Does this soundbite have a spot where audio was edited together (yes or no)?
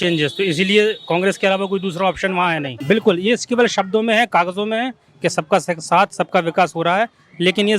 yes